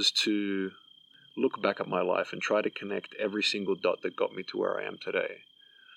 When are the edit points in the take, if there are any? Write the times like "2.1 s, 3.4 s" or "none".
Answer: 1.1 s